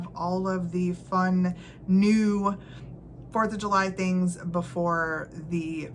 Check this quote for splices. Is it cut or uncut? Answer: uncut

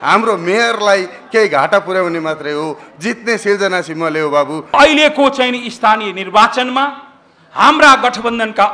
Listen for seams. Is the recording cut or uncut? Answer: cut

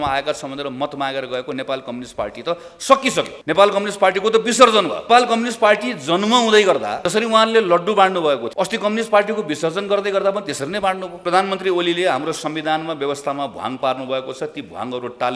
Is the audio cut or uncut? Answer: cut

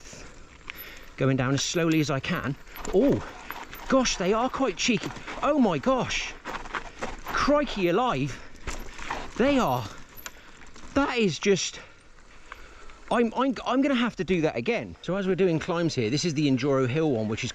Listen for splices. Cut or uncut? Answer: cut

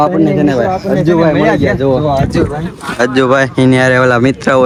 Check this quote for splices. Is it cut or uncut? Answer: uncut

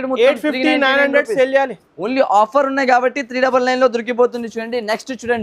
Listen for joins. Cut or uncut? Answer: uncut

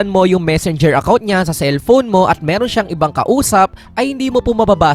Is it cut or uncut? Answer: uncut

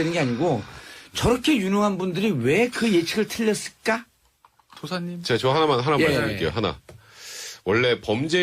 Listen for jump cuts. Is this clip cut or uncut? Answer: uncut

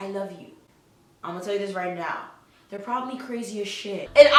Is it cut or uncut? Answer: uncut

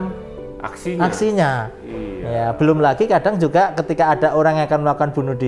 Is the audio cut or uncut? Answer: uncut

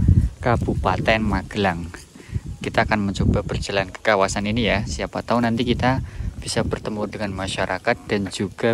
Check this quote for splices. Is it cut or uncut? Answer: uncut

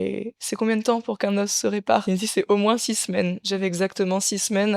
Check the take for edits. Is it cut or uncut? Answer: cut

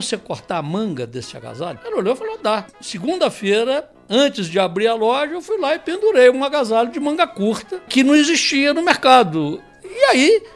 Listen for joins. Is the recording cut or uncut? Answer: cut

